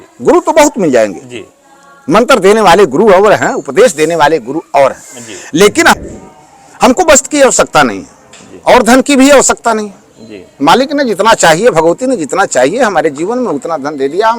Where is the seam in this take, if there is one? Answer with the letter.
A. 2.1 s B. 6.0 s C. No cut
B